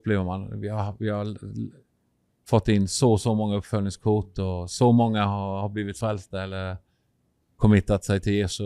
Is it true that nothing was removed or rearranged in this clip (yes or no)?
yes